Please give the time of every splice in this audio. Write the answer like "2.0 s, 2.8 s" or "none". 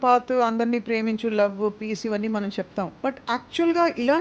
2.9 s